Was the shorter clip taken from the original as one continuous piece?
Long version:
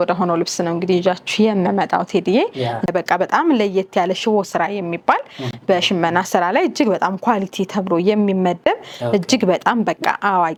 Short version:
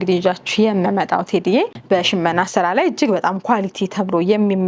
no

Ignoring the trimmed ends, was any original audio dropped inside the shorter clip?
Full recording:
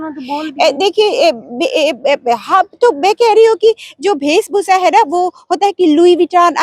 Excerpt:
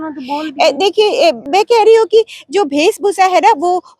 yes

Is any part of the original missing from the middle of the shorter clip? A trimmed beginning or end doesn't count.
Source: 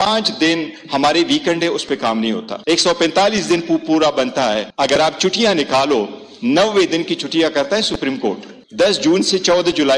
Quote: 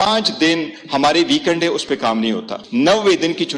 yes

